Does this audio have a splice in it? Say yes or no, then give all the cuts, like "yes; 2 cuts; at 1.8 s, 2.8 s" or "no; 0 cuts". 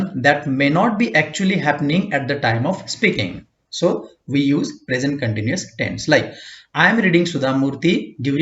no; 0 cuts